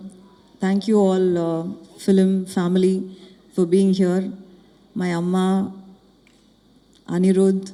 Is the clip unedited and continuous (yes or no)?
yes